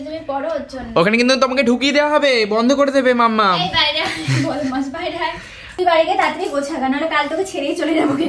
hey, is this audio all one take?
no; 1 cut; at 5.7 s

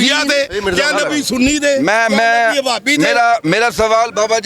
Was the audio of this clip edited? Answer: no; 0 cuts

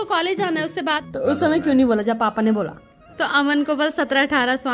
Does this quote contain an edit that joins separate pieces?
yes; 2 cuts; at 1.0 s, 3.4 s

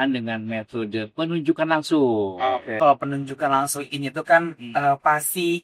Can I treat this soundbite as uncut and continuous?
no; 1 cut; at 2.7 s

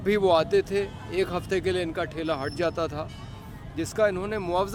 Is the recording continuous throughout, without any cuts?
yes; 0 cuts

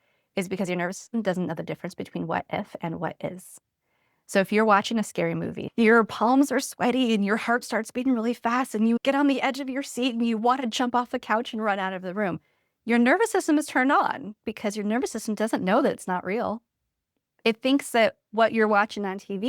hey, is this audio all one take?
no; 2 cuts; at 5.6 s, 14.4 s

